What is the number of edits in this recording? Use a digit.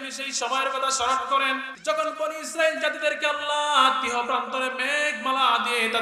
1